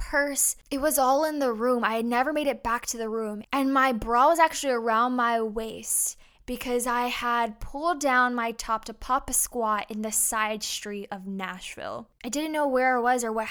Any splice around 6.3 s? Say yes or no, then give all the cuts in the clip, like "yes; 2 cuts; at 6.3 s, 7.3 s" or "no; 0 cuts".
no; 1 cut; at 12.1 s